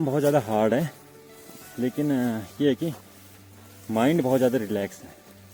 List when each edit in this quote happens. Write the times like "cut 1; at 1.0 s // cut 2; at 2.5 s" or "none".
none